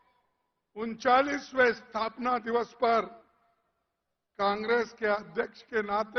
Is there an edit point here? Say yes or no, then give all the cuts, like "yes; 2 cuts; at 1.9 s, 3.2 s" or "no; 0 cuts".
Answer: no; 0 cuts